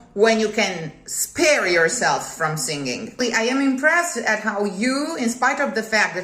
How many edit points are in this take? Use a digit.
1